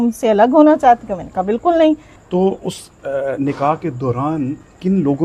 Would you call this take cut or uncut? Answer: cut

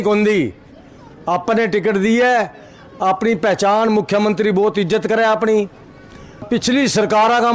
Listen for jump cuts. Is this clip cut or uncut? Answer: cut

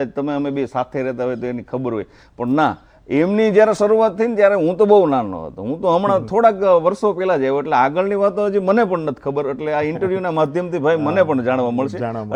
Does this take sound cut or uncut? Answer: uncut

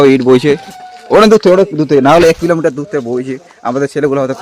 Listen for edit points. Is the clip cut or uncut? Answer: uncut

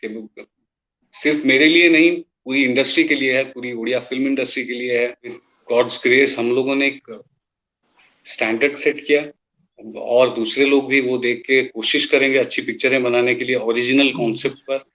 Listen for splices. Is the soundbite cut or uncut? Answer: cut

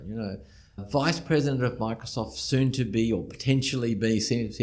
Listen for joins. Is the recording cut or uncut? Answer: uncut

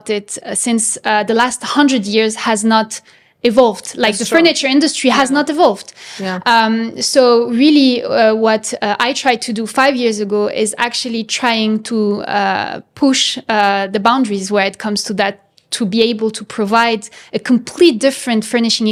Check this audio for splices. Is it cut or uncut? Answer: uncut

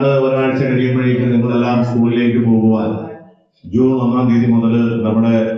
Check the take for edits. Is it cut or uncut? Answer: uncut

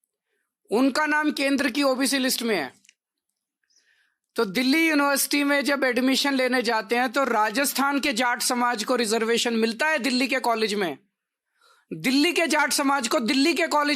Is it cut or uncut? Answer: uncut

